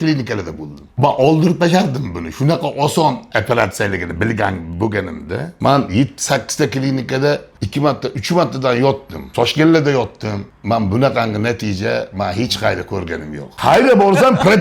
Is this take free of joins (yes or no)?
no